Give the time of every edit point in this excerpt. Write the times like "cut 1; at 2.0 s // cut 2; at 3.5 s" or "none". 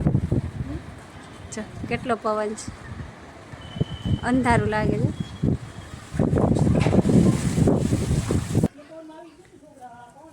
cut 1; at 8.7 s

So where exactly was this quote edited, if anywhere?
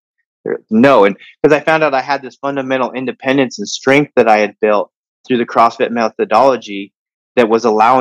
none

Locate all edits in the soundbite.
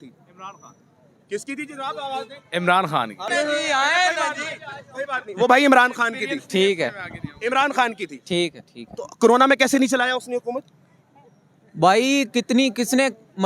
none

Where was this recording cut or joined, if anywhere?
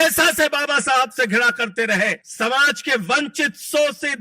cut 1; at 2.2 s

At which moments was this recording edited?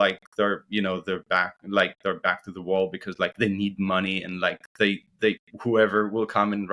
none

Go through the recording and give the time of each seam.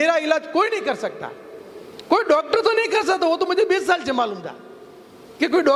none

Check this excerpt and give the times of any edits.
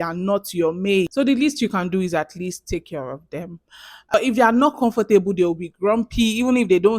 cut 1; at 1.1 s // cut 2; at 4.1 s

